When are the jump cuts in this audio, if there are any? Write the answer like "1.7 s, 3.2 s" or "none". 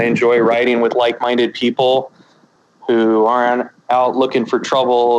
2.5 s